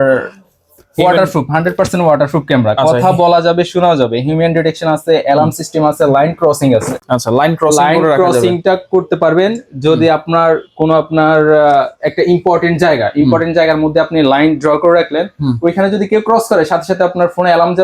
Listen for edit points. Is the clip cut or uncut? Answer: uncut